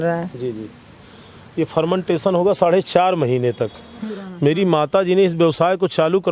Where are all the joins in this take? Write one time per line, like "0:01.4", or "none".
0:04.2

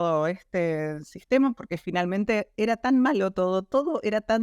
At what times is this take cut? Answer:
0:02.5

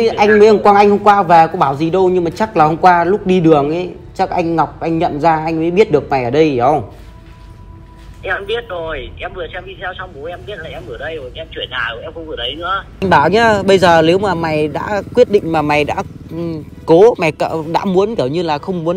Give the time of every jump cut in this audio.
0:13.0

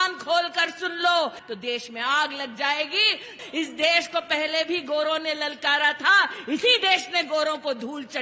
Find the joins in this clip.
0:01.4
0:03.4

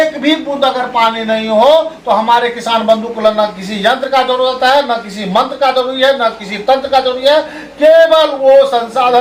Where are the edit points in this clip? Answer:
none

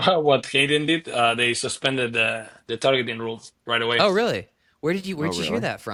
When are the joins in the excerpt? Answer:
none

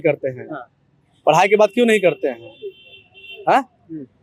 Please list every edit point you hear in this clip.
none

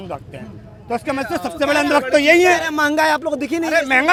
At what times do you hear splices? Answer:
none

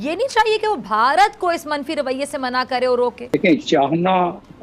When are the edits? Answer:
0:03.3

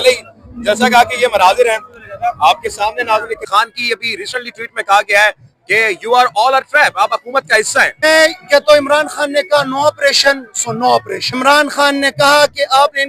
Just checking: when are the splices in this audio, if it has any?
0:03.5
0:08.0
0:11.2

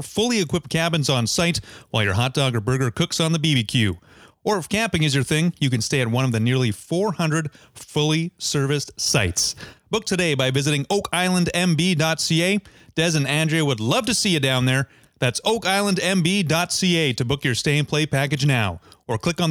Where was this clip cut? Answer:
0:15.0

